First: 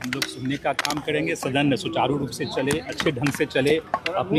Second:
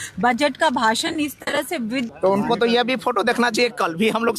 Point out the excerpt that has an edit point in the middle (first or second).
second